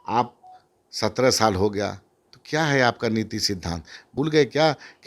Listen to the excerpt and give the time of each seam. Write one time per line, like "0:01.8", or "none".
0:04.1